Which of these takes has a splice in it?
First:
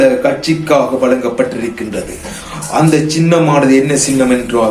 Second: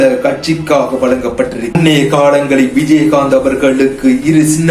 second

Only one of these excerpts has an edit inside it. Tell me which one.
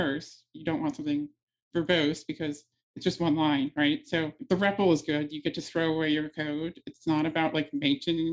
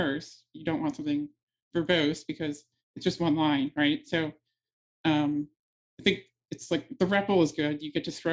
first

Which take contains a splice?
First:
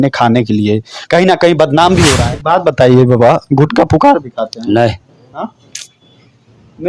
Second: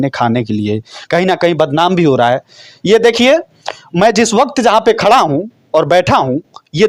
first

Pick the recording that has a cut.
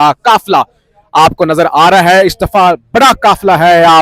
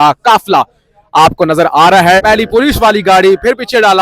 second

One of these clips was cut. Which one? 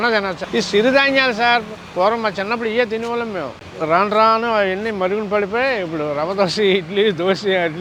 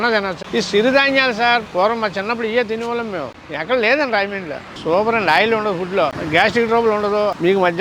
second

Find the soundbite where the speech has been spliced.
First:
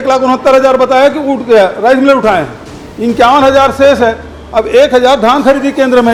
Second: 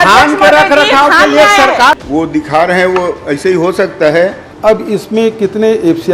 second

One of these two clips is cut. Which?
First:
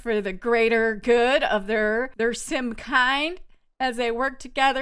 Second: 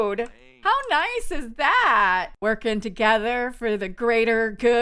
second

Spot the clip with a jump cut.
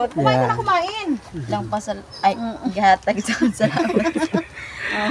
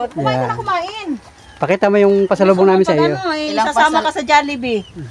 first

